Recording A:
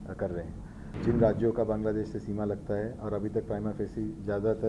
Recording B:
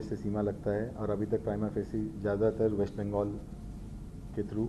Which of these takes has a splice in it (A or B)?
A